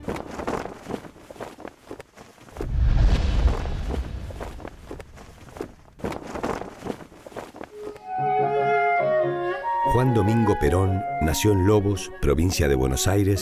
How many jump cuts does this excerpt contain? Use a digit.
1